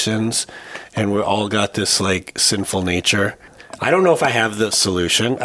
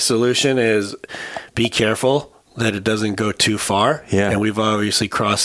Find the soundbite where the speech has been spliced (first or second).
first